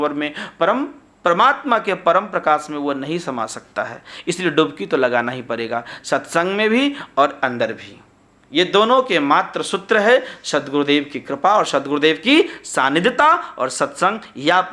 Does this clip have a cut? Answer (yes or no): no